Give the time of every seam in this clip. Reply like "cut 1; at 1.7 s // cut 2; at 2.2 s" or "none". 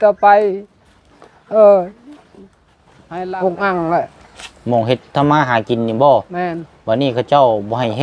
cut 1; at 2.9 s